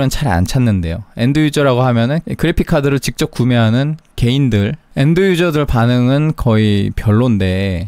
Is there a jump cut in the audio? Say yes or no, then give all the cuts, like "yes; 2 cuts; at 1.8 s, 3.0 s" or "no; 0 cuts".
no; 0 cuts